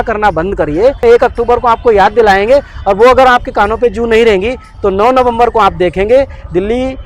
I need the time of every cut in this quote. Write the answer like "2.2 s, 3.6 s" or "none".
1.0 s